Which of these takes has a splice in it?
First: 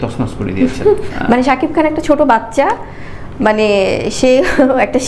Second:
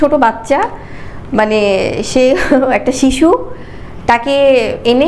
first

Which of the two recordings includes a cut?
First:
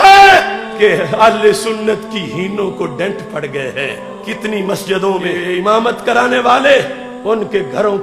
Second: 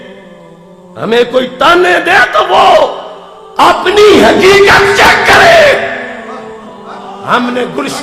first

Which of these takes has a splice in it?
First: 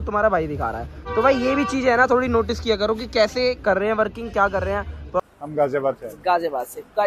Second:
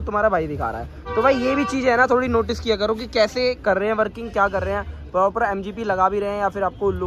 first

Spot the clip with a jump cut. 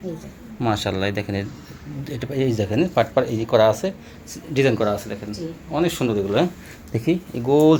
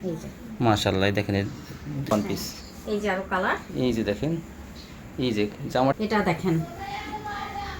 second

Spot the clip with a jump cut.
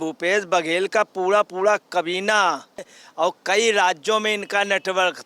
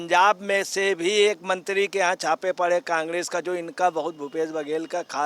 first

